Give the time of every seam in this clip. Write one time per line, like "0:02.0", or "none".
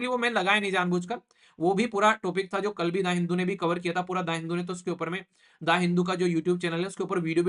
none